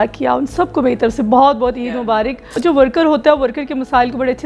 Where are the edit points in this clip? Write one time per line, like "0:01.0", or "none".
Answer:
0:02.4

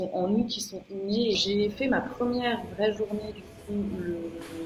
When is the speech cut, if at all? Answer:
0:01.3

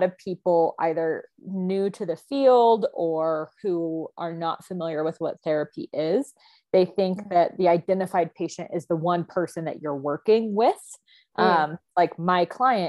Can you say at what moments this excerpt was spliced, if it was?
none

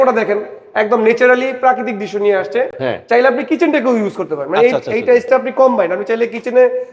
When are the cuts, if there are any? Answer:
none

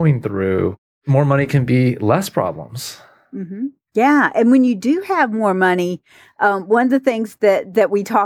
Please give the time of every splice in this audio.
0:01.1

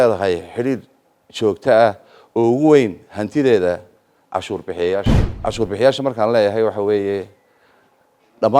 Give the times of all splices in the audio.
0:05.2

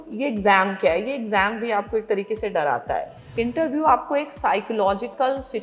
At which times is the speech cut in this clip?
0:03.2

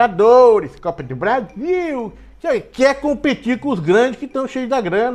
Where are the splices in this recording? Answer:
none

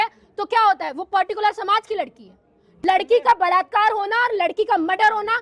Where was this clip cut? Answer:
0:02.7

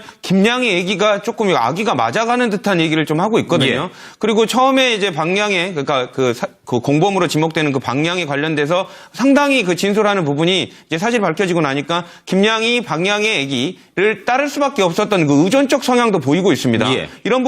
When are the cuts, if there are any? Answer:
0:08.4

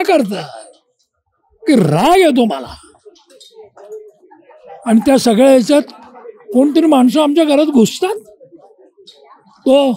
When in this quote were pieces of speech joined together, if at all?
none

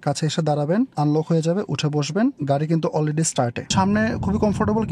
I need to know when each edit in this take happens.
0:00.9
0:02.4
0:03.7

